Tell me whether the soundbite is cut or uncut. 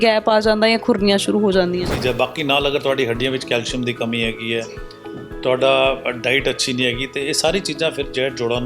cut